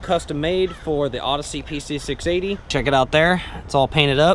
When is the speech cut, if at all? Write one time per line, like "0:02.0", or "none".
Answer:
0:02.6